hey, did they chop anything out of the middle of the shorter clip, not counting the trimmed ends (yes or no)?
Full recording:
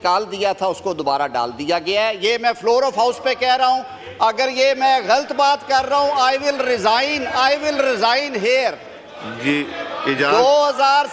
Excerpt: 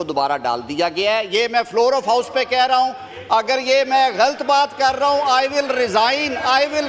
no